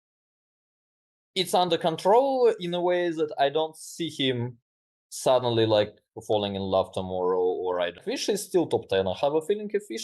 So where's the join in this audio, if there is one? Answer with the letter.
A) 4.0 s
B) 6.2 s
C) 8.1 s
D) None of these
C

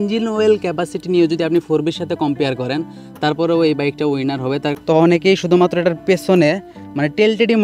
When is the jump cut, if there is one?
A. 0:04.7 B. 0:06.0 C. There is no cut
A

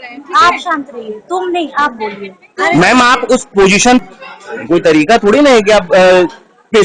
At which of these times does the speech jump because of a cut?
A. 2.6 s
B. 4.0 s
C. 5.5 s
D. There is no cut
B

